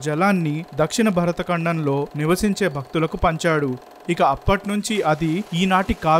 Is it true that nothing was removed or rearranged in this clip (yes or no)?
yes